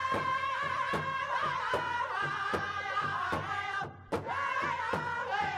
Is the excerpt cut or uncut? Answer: uncut